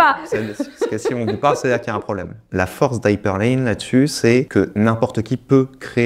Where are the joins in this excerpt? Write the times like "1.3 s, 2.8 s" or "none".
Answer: 2.4 s, 4.5 s